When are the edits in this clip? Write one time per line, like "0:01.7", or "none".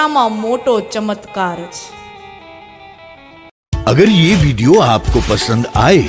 0:03.5